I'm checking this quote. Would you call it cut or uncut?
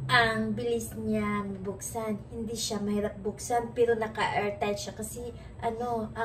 uncut